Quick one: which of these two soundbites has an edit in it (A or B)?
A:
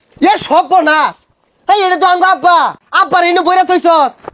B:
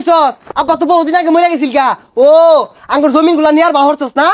A